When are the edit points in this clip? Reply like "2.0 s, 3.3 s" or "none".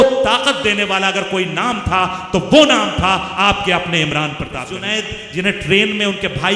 4.9 s